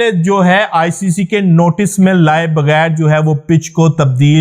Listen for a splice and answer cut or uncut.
uncut